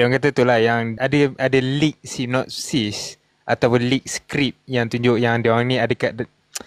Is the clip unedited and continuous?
no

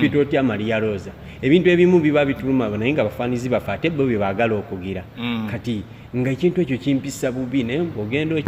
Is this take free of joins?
yes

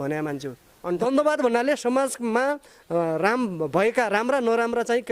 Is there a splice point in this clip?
yes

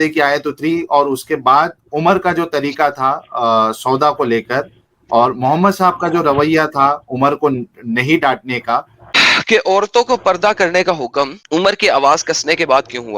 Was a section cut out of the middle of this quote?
yes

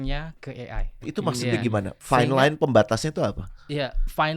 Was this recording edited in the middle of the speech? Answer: yes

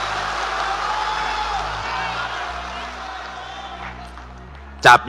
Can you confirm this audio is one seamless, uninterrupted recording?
yes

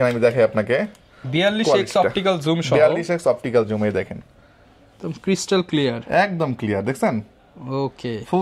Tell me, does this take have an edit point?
no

